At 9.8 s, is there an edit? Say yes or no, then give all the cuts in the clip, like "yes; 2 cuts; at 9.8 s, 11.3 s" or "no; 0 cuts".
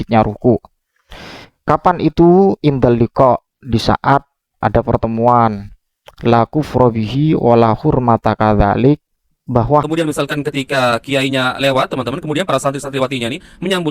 yes; 1 cut; at 9.8 s